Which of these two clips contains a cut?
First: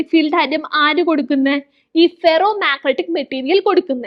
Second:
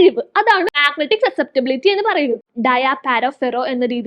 second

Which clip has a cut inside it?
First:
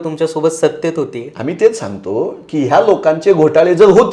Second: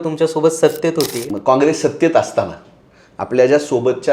second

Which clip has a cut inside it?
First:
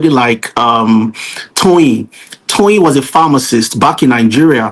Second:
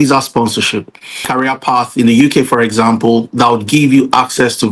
second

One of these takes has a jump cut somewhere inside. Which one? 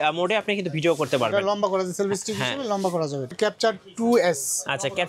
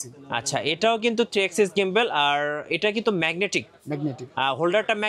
first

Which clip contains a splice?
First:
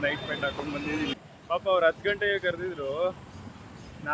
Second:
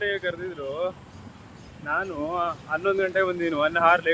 first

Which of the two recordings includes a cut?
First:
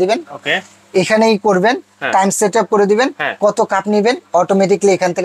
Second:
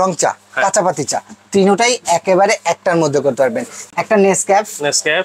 second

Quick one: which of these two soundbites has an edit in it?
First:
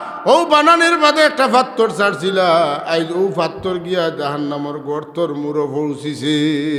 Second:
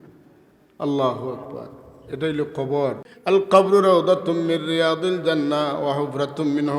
second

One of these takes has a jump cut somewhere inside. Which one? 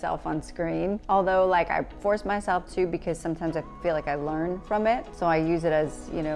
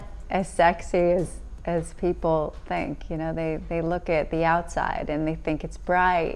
first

